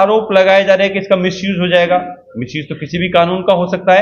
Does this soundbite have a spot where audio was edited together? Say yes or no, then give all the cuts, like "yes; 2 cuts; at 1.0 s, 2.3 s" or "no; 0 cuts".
no; 0 cuts